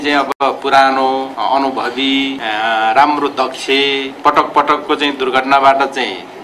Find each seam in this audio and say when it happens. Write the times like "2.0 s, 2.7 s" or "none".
1.3 s, 2.4 s, 4.1 s